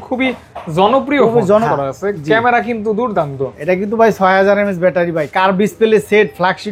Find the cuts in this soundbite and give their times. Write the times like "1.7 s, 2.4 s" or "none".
1.6 s

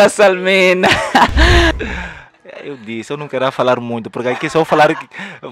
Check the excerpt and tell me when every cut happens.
1.7 s

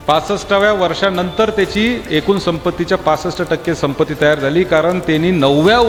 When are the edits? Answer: none

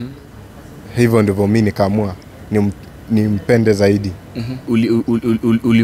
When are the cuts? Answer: 4.7 s

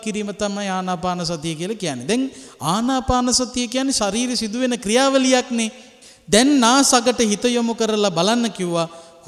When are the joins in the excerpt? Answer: none

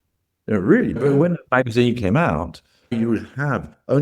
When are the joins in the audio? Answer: 1.0 s, 2.9 s

